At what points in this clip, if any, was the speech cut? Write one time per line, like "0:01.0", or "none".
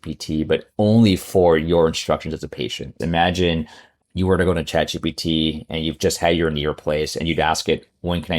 0:02.9